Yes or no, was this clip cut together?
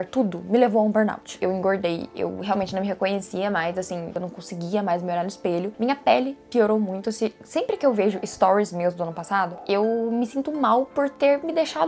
yes